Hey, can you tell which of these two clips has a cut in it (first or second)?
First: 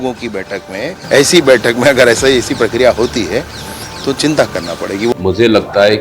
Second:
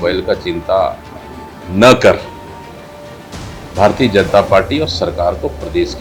first